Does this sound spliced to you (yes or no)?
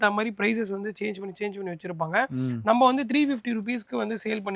no